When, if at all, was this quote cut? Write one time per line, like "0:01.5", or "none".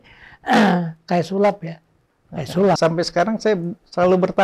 0:02.8